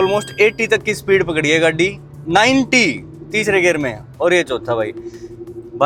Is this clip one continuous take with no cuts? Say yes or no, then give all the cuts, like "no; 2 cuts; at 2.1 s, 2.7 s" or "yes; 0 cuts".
yes; 0 cuts